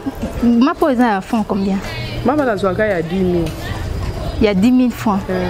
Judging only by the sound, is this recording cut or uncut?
uncut